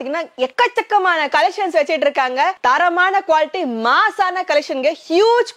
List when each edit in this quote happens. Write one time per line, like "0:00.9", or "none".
none